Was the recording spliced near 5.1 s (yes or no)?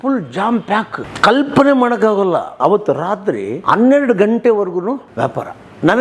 yes